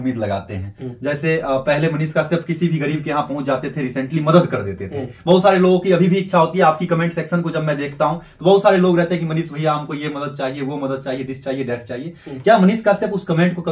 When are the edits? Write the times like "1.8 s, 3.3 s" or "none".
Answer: none